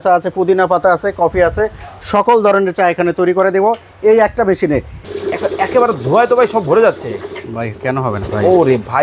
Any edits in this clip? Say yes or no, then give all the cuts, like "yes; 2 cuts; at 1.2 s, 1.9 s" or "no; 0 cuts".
yes; 1 cut; at 5.0 s